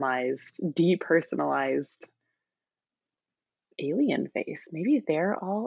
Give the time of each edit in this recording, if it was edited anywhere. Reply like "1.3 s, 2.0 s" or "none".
none